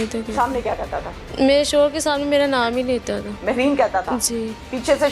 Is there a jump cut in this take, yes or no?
yes